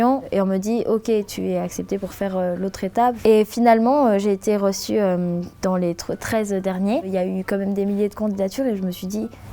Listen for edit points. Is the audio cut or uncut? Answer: cut